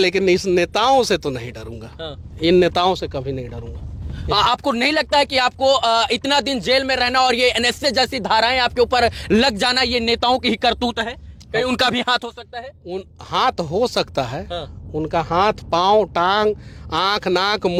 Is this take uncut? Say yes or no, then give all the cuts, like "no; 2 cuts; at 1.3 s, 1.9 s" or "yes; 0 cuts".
yes; 0 cuts